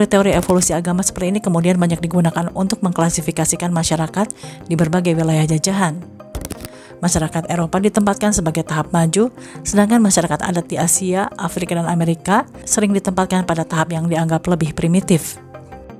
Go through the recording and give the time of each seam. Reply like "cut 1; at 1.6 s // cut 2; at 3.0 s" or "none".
none